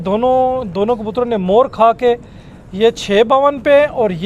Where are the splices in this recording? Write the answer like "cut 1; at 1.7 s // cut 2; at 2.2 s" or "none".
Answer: none